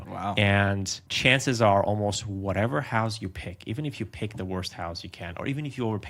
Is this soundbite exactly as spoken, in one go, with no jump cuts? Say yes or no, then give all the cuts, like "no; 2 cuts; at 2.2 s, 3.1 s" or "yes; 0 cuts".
yes; 0 cuts